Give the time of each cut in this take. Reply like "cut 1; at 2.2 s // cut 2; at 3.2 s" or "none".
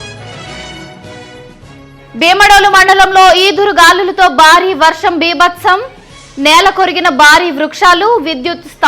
cut 1; at 1.5 s